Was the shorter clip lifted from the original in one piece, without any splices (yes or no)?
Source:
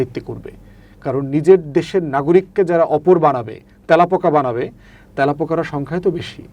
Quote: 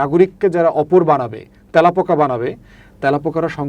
yes